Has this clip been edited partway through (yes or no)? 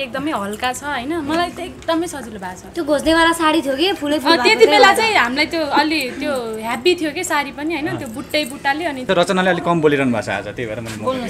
yes